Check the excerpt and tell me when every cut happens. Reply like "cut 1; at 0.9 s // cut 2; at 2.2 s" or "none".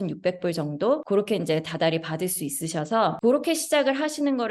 cut 1; at 1.0 s // cut 2; at 3.2 s